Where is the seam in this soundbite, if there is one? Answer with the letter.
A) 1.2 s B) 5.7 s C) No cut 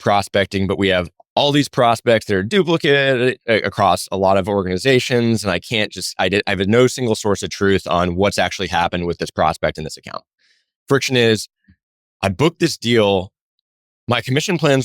A